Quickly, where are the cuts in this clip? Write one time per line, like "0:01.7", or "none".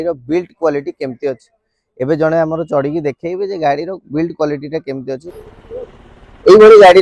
0:05.3